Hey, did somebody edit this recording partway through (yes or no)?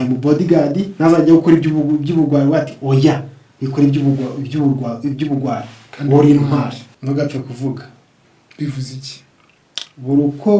yes